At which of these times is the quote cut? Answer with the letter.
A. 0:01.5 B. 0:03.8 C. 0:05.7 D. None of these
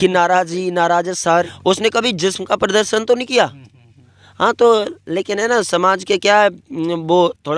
A